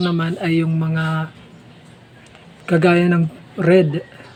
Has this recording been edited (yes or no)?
no